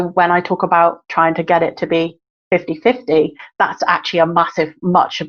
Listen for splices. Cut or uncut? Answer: uncut